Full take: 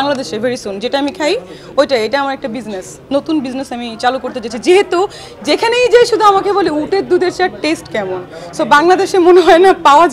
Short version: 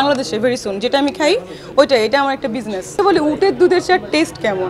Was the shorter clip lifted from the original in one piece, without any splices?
no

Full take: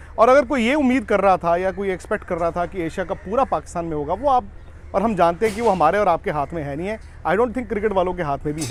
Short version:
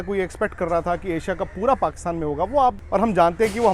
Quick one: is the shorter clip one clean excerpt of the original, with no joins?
no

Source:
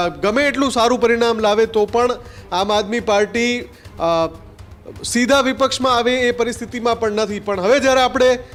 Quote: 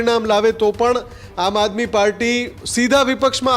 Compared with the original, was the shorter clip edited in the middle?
yes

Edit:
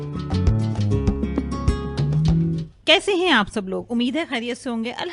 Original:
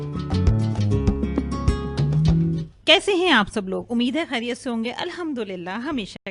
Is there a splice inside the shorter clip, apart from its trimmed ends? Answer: no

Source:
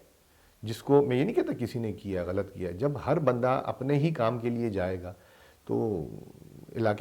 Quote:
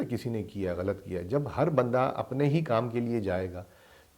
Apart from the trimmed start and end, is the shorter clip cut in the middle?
no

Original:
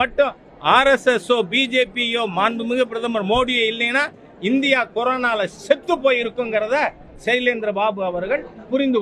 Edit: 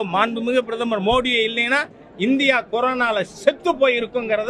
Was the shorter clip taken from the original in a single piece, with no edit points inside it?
yes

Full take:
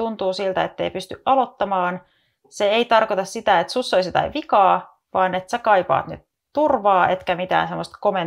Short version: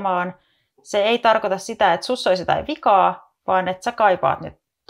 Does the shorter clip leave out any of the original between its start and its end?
no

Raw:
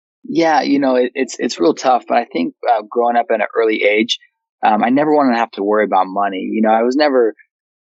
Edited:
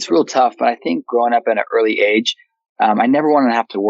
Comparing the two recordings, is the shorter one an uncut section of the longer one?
no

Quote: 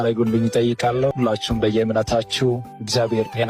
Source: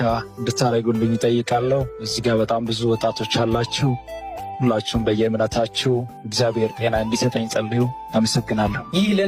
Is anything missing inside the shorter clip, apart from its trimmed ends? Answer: yes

